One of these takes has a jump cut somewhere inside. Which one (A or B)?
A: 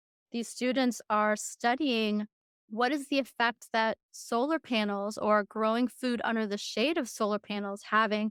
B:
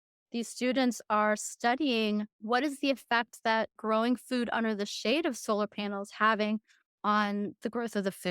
B